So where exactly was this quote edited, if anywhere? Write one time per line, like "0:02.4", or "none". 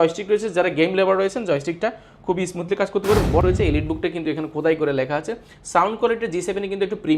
0:03.4